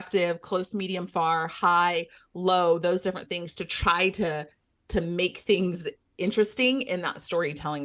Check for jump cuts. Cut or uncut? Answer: uncut